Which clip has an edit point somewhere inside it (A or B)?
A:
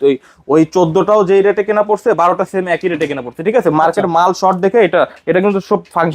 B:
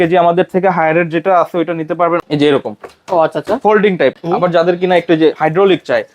B